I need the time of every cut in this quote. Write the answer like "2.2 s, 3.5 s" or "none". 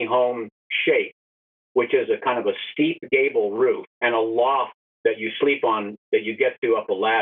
3.9 s, 4.8 s